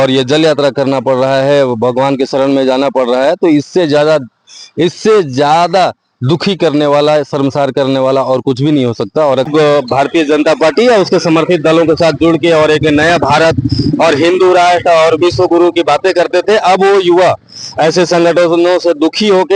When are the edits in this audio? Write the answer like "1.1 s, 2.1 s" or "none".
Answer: 9.5 s